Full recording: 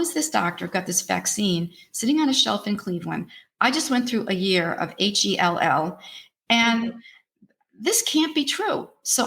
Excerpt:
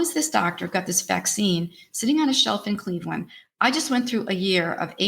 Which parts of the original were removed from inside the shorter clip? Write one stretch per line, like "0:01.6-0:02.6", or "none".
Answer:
none